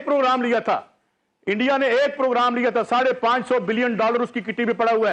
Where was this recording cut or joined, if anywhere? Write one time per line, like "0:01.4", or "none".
none

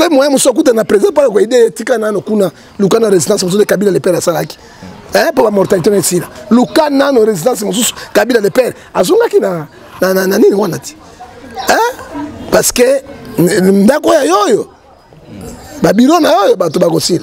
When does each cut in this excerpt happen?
none

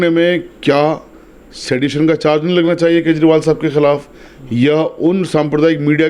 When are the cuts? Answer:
none

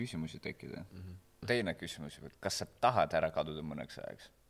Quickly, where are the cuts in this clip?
0:01.4

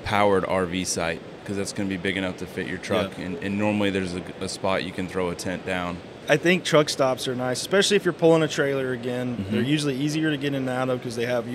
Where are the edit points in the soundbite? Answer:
0:06.1

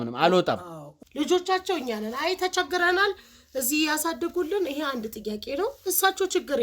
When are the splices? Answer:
0:01.0

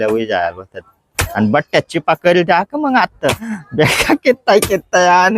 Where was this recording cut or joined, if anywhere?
0:01.2
0:03.6

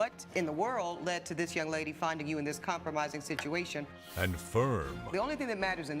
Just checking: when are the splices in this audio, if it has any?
0:04.0

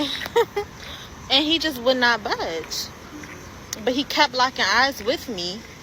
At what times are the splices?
none

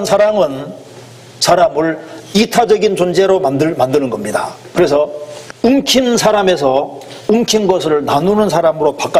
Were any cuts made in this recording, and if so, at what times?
none

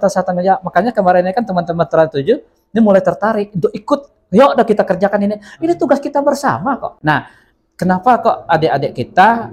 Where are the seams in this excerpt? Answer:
0:06.9

